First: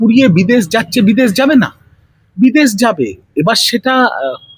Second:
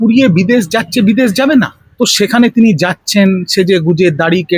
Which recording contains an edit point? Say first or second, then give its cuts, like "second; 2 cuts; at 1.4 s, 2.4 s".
second; 1 cut; at 1.8 s